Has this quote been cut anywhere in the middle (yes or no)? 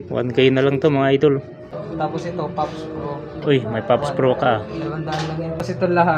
yes